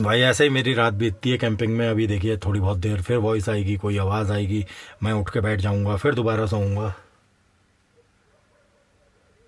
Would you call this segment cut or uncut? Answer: uncut